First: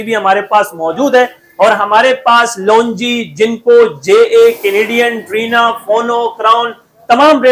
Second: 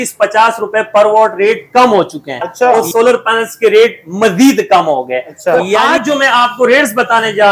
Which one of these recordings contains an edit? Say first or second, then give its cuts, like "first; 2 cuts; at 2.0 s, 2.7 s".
second; 2 cuts; at 2.8 s, 5.7 s